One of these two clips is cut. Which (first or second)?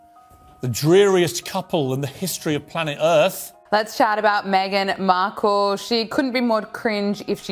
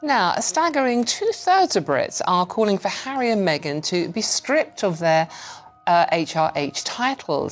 first